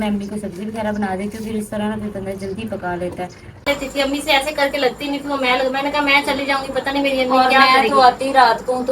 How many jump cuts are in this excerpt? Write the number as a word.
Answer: one